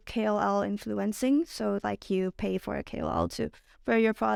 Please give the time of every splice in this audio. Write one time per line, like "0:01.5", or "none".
none